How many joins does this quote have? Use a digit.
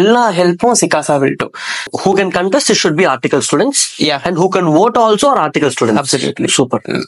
1